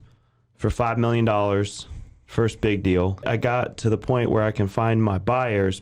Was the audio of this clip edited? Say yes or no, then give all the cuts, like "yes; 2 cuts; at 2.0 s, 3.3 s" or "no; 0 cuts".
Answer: yes; 1 cut; at 3.2 s